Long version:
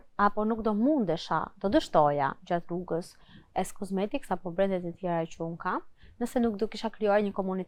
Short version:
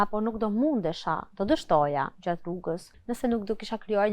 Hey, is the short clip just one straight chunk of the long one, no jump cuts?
no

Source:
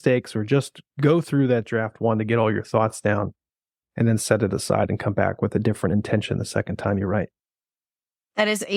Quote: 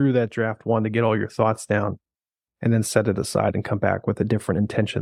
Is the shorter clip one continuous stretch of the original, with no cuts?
yes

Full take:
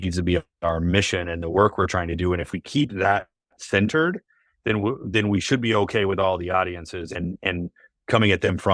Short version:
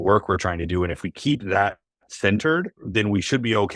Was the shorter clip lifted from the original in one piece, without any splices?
no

